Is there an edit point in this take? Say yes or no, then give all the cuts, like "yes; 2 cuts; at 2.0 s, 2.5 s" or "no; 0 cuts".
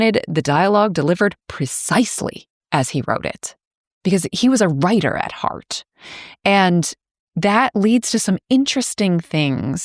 no; 0 cuts